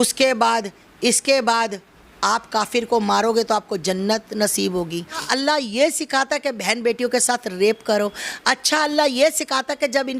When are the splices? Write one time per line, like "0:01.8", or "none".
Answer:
0:05.2